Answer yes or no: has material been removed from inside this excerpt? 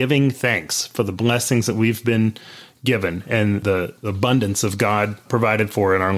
yes